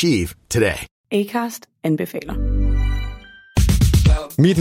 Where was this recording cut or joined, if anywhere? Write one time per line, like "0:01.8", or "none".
0:00.9